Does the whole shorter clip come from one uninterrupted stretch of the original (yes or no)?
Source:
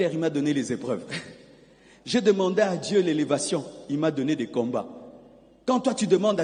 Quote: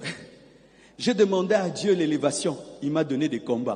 yes